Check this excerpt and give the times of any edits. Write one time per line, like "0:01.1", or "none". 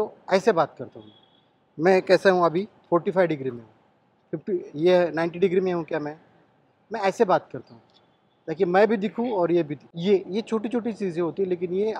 0:09.8

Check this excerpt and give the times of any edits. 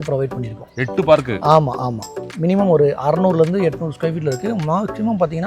0:02.3

